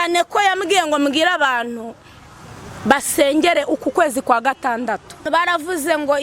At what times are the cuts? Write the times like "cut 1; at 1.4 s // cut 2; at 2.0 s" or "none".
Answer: cut 1; at 5.2 s